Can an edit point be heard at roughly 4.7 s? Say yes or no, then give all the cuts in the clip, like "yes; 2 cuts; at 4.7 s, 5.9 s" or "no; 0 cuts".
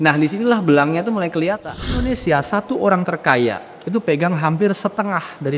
no; 1 cut; at 2.0 s